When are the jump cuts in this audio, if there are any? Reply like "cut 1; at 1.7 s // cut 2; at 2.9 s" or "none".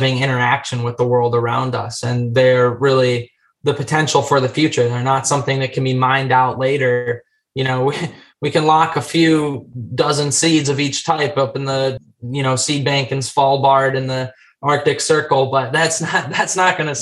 cut 1; at 12.0 s